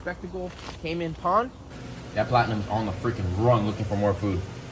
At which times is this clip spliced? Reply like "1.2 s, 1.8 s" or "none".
1.7 s